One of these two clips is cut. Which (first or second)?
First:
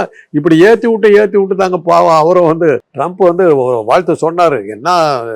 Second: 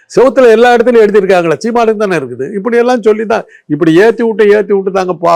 first